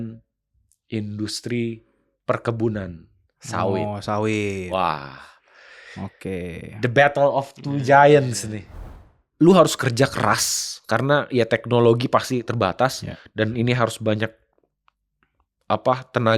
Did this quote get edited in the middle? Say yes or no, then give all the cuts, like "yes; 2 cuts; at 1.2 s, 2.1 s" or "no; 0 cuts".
yes; 1 cut; at 8.9 s